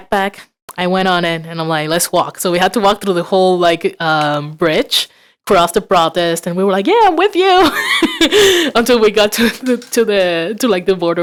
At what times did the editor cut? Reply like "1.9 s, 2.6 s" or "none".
none